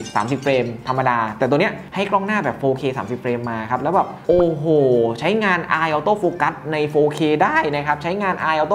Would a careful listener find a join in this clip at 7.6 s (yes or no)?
no